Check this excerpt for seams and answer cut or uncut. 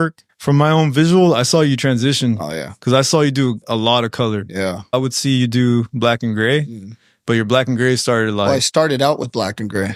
uncut